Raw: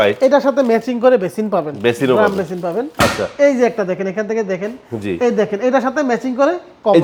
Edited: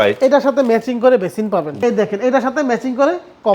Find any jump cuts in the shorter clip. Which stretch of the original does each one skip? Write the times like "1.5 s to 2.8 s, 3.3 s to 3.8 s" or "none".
1.8 s to 5.2 s